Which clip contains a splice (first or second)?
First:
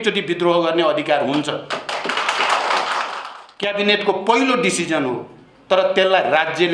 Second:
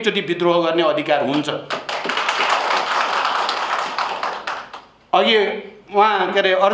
first